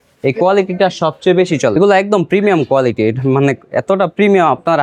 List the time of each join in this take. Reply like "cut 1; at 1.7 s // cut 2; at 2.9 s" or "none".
cut 1; at 1.7 s